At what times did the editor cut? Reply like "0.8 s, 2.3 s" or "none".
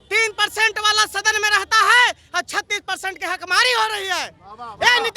none